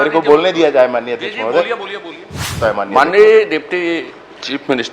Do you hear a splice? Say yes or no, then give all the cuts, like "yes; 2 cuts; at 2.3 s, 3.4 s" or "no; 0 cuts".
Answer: yes; 1 cut; at 2.5 s